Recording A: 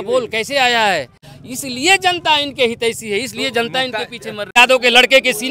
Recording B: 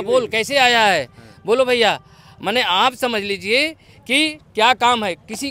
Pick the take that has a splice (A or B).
A